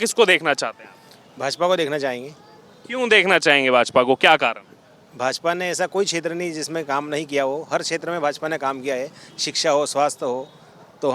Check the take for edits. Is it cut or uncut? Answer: uncut